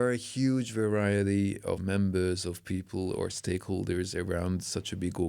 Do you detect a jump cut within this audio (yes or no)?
yes